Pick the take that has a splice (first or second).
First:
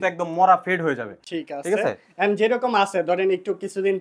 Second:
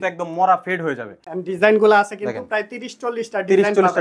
second